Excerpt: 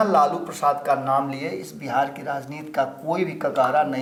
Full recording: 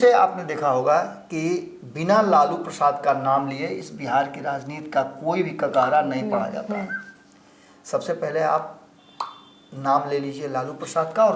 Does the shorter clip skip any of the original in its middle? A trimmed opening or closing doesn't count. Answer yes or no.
no